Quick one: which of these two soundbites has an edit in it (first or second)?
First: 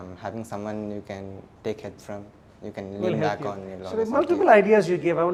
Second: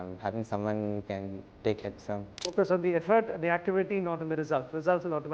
second